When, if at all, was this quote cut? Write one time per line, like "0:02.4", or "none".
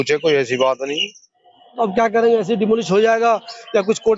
none